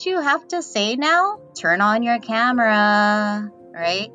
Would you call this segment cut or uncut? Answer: cut